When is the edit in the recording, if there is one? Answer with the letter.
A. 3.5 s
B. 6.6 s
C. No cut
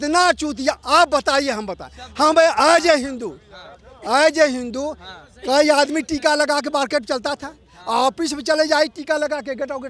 C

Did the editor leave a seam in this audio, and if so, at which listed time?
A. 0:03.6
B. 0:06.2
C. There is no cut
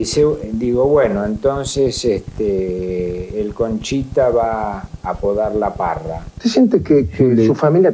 B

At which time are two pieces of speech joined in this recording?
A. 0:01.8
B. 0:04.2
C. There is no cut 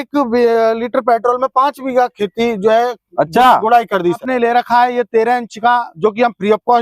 B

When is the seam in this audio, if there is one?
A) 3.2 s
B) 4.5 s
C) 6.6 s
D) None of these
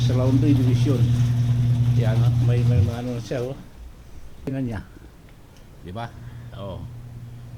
B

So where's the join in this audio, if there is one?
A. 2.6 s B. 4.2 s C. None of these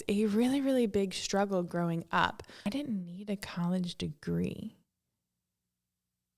A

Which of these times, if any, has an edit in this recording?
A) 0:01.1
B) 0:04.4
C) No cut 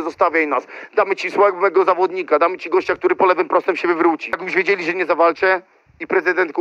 B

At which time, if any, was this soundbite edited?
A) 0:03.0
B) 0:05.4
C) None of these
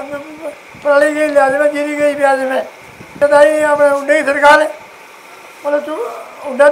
A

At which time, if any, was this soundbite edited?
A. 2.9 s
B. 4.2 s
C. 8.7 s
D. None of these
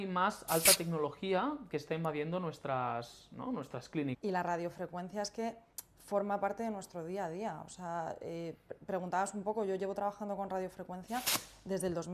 B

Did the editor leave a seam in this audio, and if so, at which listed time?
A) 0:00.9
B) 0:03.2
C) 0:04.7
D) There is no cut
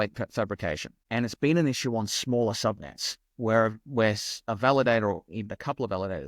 A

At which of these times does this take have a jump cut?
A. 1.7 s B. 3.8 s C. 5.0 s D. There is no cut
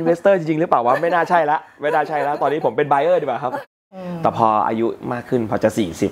B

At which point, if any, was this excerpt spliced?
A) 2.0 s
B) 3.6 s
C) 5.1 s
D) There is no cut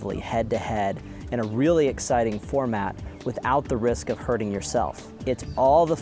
C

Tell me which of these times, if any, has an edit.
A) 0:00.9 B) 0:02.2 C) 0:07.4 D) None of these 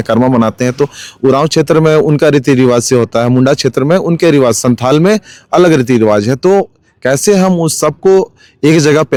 D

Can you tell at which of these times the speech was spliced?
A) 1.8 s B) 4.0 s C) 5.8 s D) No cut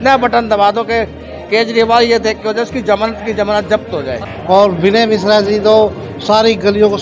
B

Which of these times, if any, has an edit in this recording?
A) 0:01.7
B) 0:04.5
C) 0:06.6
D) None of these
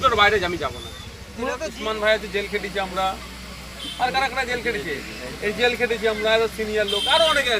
A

